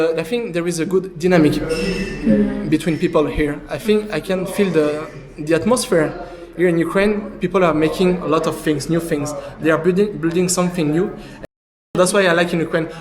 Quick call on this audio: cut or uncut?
cut